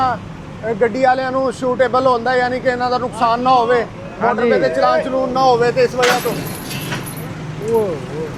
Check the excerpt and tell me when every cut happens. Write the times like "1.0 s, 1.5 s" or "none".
none

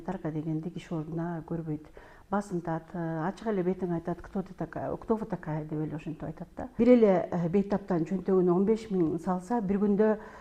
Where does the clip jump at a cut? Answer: 6.7 s

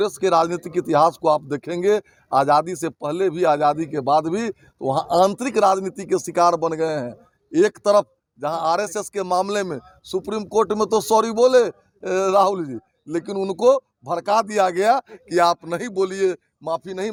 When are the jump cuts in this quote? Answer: none

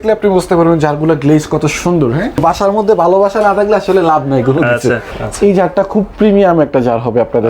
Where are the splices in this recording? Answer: 2.4 s, 5.2 s

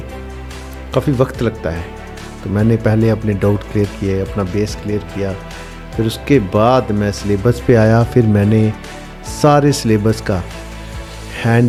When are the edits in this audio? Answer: none

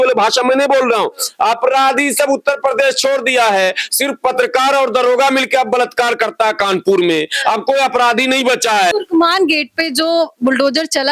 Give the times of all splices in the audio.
none

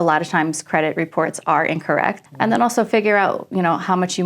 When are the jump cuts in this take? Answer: 2.2 s

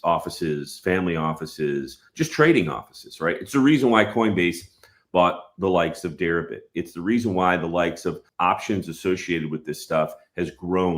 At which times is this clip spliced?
8.3 s

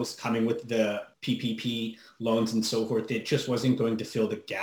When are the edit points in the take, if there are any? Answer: 1.1 s

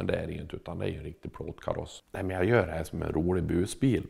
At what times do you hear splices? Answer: 2.0 s

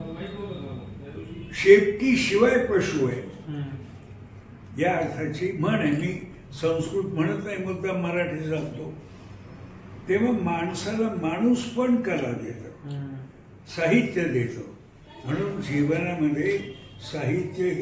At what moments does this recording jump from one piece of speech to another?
none

